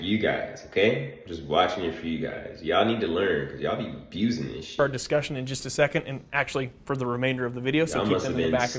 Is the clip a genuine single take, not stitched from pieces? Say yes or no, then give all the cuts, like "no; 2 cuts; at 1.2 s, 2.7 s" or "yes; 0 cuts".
yes; 0 cuts